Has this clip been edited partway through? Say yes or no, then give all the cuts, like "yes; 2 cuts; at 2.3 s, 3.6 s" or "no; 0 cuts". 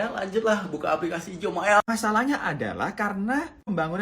yes; 1 cut; at 1.9 s